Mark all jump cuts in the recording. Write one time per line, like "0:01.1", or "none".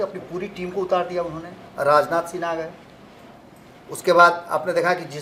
none